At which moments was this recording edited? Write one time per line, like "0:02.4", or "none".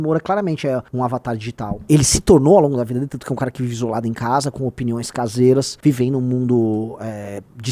0:01.2
0:05.7